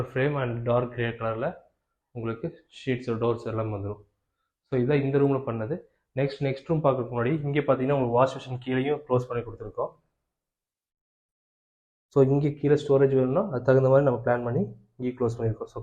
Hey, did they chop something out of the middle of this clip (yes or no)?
no